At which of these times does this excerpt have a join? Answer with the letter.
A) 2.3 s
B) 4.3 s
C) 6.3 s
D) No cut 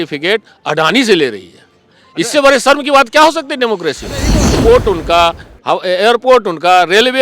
B